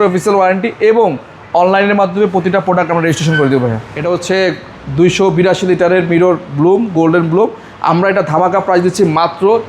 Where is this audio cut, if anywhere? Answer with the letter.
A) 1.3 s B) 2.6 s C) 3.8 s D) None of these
C